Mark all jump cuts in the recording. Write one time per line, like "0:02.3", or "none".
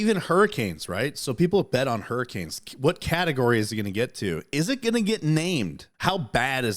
0:05.8